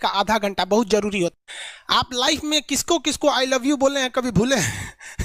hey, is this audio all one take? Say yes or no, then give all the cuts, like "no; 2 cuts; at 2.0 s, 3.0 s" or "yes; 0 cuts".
no; 1 cut; at 1.3 s